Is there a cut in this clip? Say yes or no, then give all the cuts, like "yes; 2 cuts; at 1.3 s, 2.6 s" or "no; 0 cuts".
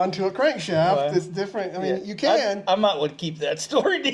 no; 0 cuts